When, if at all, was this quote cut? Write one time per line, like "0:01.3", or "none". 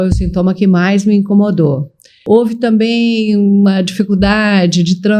0:02.2